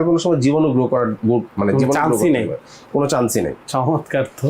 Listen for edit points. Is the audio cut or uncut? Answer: uncut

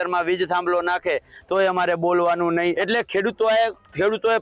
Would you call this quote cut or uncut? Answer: cut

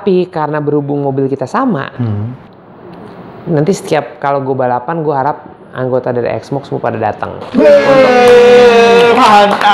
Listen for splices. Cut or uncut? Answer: uncut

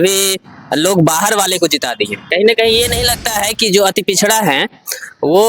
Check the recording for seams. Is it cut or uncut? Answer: cut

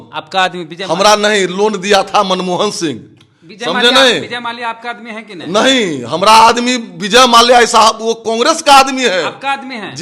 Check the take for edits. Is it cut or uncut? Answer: uncut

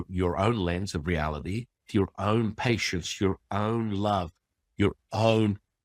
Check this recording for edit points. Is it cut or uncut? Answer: cut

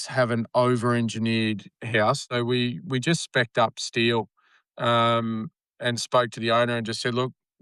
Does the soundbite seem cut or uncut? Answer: cut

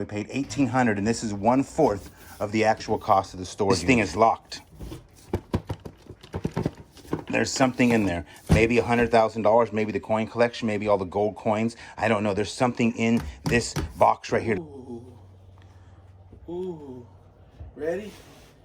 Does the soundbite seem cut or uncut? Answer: cut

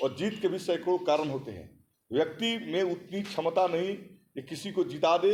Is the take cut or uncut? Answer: uncut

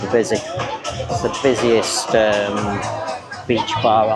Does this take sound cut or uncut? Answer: uncut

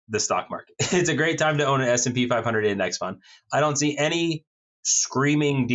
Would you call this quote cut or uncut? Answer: uncut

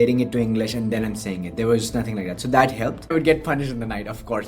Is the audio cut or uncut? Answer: cut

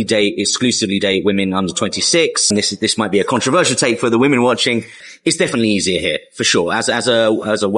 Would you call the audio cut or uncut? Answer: cut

